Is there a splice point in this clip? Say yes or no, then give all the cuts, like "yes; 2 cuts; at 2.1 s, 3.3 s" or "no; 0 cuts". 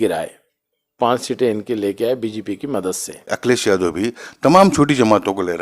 yes; 1 cut; at 3.3 s